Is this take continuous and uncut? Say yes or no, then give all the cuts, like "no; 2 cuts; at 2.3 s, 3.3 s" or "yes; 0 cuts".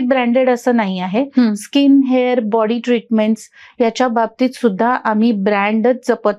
yes; 0 cuts